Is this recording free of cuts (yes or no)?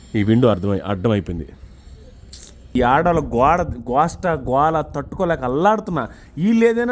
no